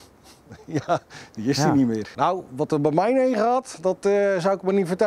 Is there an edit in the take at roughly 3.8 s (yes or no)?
no